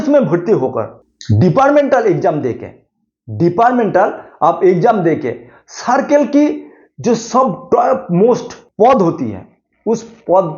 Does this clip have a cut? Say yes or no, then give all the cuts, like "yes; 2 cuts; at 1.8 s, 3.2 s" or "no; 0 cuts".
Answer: yes; 1 cut; at 8.6 s